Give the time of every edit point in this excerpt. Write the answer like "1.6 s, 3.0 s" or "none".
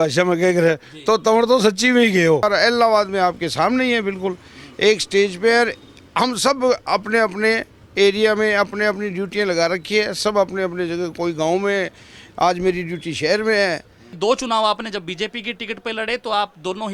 2.4 s, 14.0 s